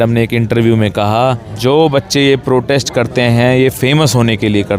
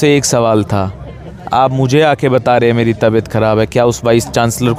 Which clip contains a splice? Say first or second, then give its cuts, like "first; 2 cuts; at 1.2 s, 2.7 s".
first; 1 cut; at 1.5 s